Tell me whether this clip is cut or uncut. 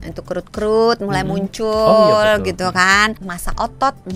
cut